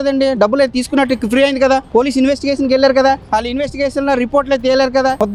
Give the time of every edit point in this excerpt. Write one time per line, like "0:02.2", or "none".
none